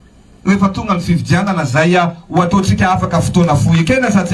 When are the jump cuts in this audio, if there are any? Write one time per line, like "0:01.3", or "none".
0:01.5